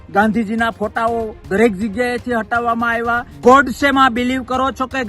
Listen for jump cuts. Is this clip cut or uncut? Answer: cut